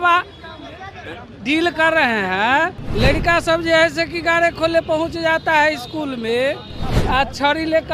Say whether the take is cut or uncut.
cut